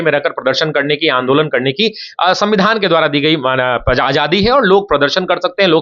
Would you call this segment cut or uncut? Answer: uncut